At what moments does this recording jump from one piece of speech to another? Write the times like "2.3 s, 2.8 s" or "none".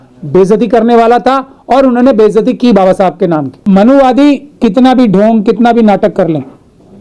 3.6 s